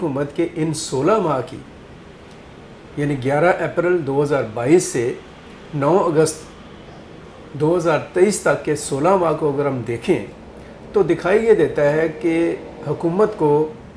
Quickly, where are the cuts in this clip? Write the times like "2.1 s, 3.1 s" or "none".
none